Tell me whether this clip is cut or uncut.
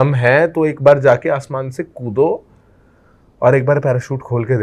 uncut